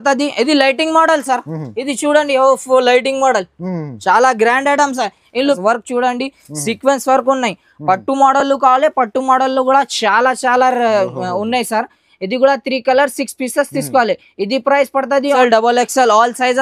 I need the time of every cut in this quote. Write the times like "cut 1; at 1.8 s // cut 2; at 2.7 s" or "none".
cut 1; at 5.5 s // cut 2; at 15.4 s